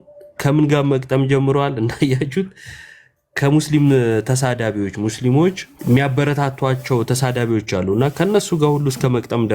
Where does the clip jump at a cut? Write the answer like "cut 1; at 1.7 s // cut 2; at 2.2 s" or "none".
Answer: cut 1; at 5.7 s